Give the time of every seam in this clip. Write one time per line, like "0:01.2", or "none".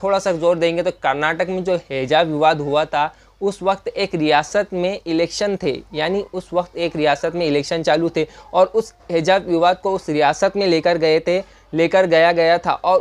none

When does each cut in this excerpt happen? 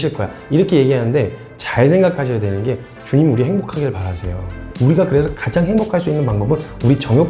none

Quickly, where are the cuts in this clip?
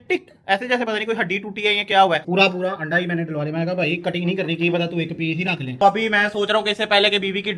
0:02.2
0:05.8

